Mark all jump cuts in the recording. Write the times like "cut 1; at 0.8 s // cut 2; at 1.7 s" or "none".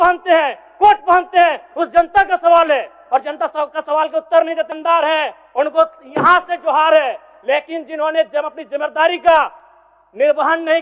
none

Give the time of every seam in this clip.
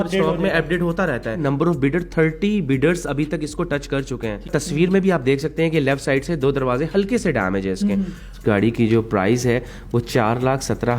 cut 1; at 1.4 s // cut 2; at 4.5 s // cut 3; at 8.3 s

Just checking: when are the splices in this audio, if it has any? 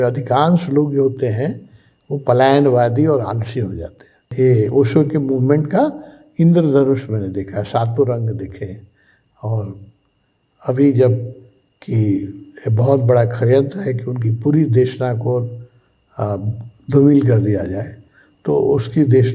cut 1; at 4.3 s

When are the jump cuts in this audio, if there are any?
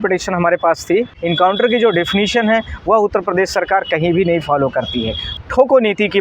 cut 1; at 1.1 s // cut 2; at 5.3 s

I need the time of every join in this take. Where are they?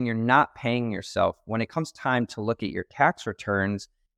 none

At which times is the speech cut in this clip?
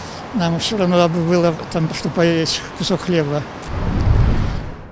cut 1; at 3.7 s

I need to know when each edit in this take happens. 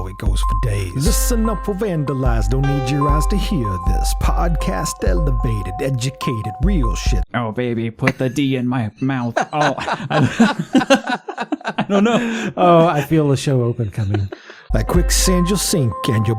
cut 1; at 7.1 s // cut 2; at 14.6 s

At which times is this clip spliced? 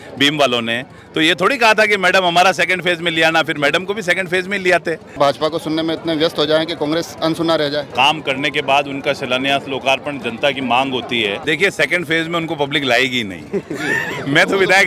cut 1; at 5.2 s // cut 2; at 7.9 s // cut 3; at 11.4 s

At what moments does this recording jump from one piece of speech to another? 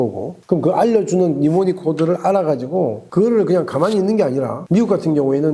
none

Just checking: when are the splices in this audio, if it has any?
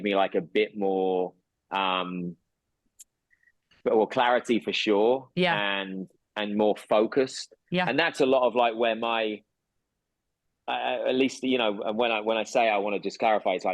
none

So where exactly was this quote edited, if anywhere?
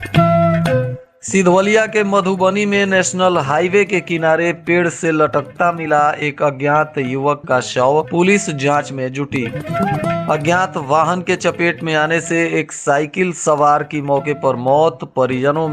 cut 1; at 0.9 s

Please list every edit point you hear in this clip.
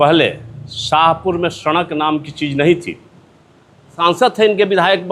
cut 1; at 3.9 s

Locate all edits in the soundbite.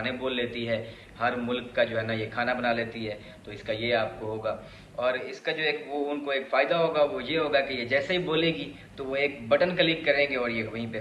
none

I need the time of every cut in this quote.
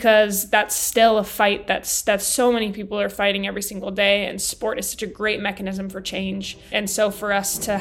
cut 1; at 6.6 s

